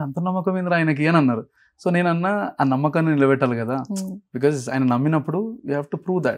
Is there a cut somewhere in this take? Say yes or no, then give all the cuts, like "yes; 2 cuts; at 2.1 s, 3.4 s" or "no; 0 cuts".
no; 0 cuts